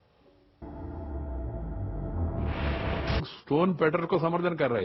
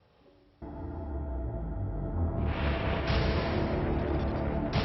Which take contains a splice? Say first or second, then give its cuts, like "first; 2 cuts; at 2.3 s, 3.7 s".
second; 1 cut; at 3.2 s